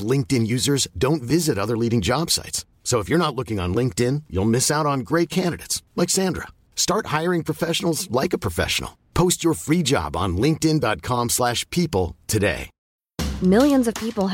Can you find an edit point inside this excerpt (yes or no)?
yes